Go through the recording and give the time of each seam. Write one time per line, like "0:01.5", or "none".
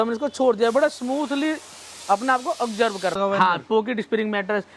0:03.2